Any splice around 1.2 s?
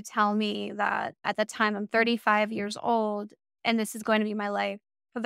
yes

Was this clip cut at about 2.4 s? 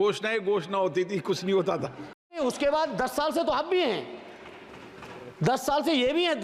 yes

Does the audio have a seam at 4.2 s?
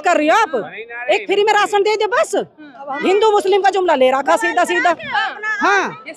no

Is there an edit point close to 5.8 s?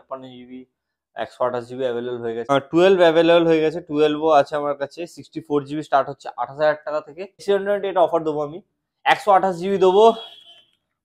no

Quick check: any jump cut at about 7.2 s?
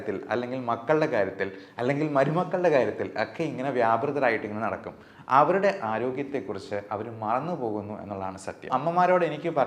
no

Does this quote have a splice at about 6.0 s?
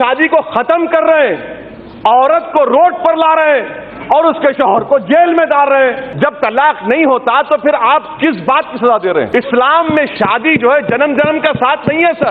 yes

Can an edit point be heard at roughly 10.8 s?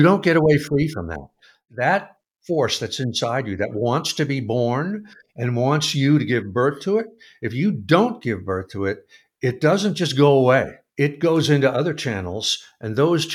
yes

